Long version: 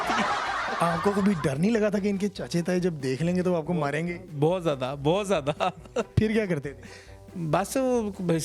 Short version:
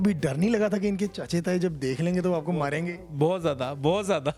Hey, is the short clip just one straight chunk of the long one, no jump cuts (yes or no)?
yes